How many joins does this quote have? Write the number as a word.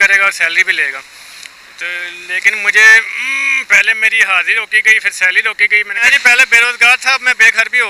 one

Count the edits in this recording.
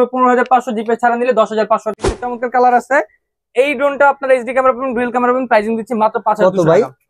one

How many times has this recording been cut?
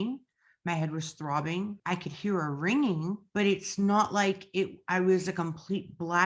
two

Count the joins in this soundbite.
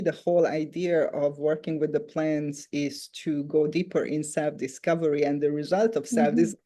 zero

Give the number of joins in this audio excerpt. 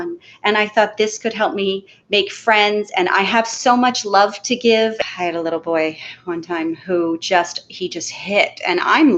one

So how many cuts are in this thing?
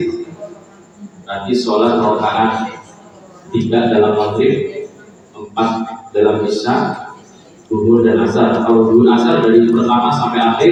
zero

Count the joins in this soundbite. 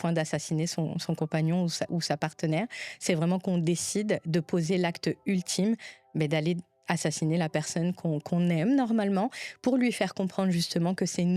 zero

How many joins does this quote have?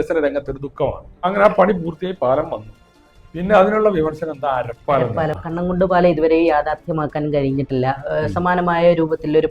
two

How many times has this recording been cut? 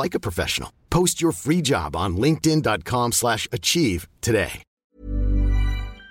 one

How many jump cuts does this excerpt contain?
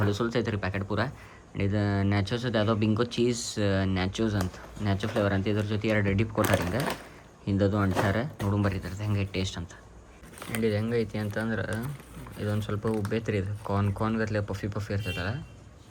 zero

